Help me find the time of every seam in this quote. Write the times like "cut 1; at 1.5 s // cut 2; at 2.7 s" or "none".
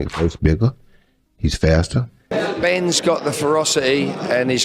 cut 1; at 2.3 s